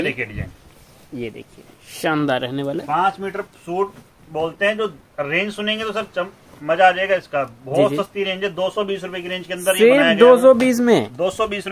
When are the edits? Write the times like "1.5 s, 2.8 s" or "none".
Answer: none